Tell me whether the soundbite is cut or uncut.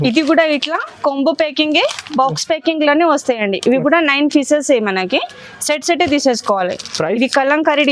uncut